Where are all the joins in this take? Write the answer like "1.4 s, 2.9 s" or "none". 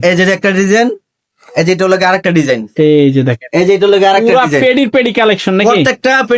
none